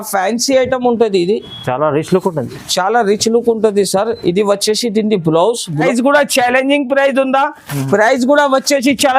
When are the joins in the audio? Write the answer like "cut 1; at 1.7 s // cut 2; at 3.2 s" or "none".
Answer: cut 1; at 5.9 s